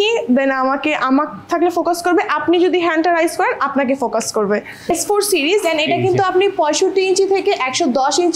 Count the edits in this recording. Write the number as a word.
one